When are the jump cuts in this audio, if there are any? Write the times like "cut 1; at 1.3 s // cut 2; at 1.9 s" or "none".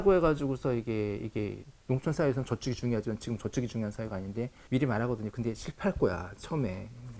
cut 1; at 1.7 s // cut 2; at 4.6 s